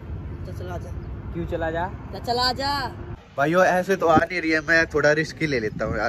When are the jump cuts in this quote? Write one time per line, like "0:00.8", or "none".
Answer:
0:03.1

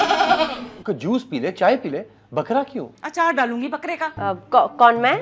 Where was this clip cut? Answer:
0:04.1

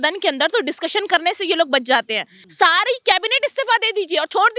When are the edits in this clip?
0:02.4

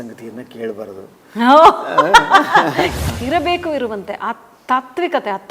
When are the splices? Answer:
0:03.0

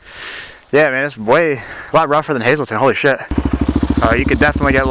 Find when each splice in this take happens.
0:03.3

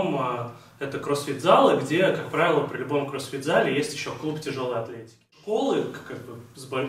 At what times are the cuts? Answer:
0:05.4

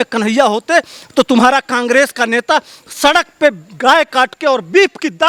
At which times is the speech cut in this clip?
none

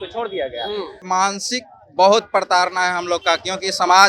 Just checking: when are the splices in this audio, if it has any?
0:01.0

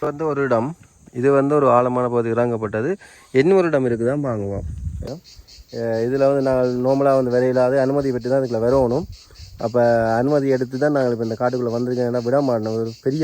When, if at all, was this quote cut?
0:05.1

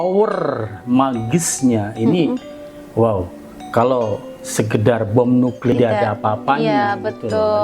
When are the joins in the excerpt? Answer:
0:05.7

